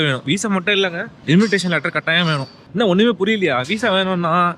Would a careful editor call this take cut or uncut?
cut